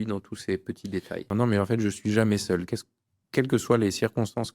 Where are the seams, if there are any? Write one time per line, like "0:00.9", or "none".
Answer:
0:01.3